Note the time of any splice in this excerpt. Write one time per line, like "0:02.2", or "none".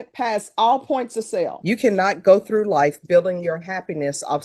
0:01.6

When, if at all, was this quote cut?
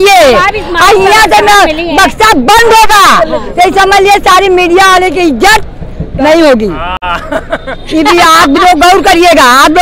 none

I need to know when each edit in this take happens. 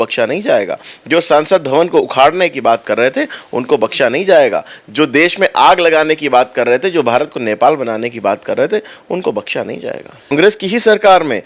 0:10.3

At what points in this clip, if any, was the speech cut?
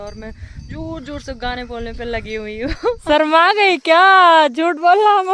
0:03.0

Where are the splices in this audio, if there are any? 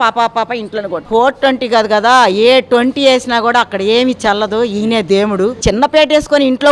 0:01.0
0:05.6

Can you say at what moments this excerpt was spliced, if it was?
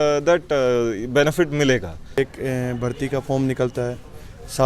0:02.2

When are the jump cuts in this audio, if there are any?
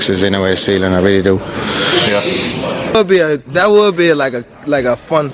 0:02.9

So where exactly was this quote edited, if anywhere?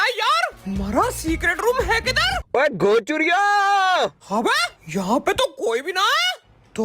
0:02.3
0:04.2

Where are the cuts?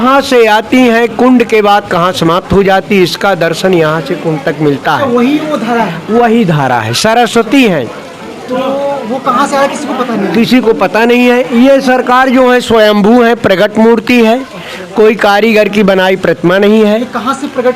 none

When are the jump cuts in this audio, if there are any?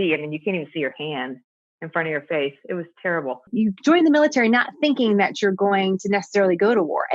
0:03.5

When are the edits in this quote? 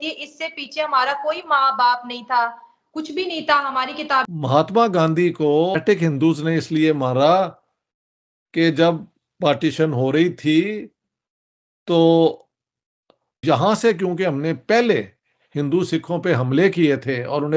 0:04.3
0:05.8
0:13.3

